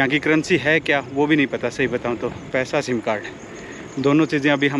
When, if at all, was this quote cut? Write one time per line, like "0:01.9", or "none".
0:02.4